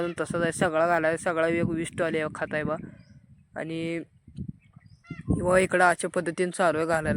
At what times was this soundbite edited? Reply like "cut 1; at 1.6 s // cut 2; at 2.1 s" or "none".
none